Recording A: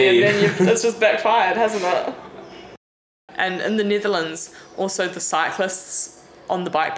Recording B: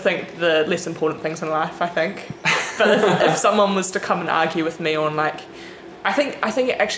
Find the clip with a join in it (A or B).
A